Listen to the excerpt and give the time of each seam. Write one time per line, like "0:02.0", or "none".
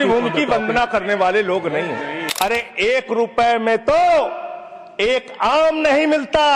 0:02.2